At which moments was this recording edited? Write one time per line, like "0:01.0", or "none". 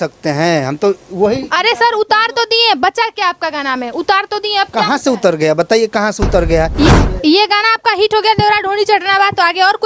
0:06.7

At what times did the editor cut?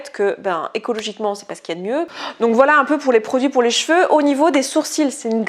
0:02.1

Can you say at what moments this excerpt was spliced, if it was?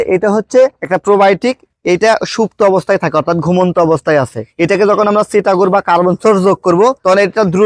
none

